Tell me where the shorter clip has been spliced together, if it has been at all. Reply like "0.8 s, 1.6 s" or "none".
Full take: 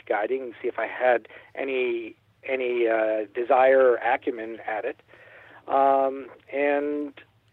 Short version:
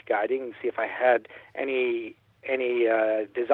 none